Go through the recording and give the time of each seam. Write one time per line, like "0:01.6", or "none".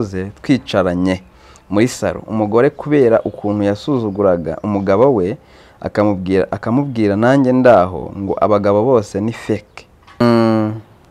0:10.2

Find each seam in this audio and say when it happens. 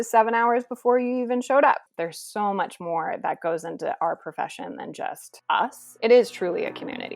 0:01.9
0:05.8

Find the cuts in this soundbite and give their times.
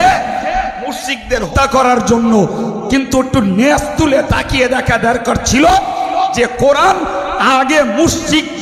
0:01.5

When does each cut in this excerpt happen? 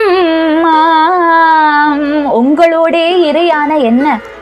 none

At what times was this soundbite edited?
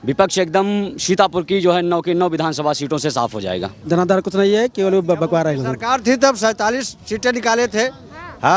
0:03.8

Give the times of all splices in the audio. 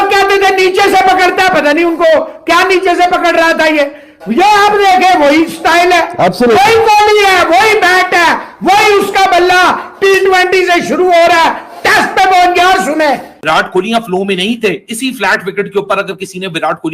0:13.3

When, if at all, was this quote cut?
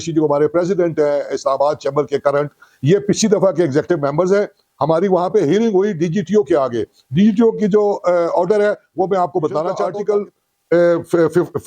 0:09.8

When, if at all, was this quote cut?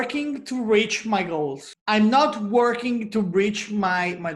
none

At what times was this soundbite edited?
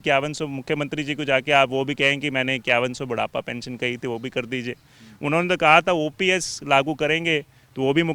none

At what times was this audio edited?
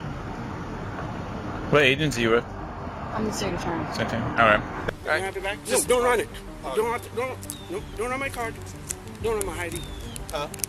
0:04.8

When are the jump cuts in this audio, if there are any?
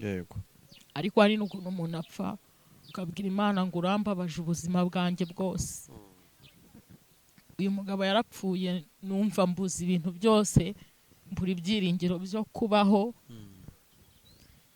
none

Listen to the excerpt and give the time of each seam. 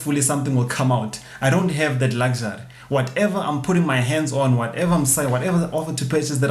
none

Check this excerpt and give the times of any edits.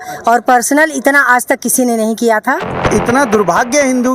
0:02.8

